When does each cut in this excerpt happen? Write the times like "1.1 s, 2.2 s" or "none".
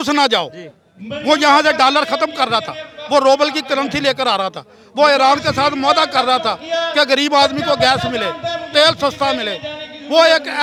none

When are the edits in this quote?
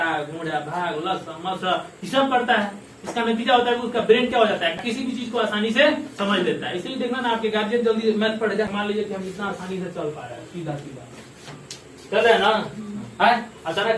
4.7 s, 8.7 s

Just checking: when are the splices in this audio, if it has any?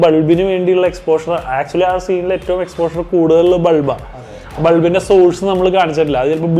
none

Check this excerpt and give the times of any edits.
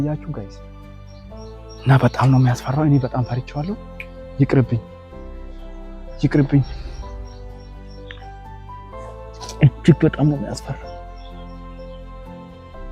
none

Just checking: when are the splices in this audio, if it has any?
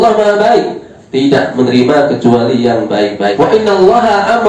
3.3 s

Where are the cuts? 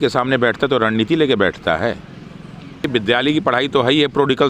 2.8 s

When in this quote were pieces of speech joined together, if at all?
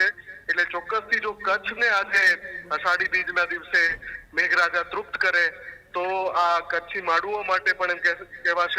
none

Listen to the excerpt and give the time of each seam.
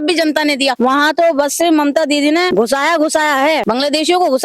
0.8 s, 2.5 s, 3.6 s

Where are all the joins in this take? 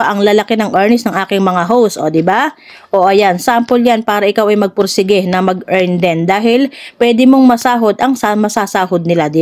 none

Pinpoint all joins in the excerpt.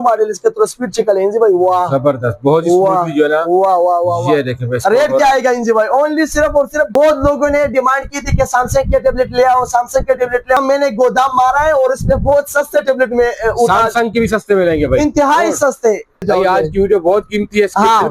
6.9 s, 10.6 s, 16.2 s

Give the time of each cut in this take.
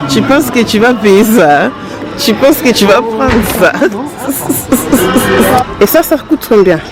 5.7 s

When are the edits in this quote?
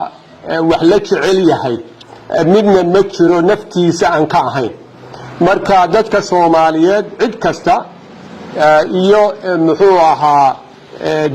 none

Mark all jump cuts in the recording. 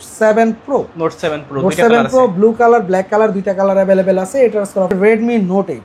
4.9 s

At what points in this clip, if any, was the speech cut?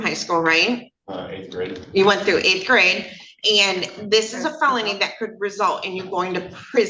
none

